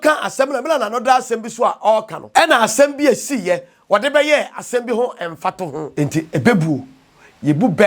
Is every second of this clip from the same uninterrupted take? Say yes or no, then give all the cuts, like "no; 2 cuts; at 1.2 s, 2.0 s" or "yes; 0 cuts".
no; 2 cuts; at 2.2 s, 5.9 s